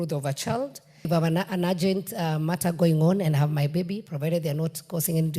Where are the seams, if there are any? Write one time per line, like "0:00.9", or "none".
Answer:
0:01.1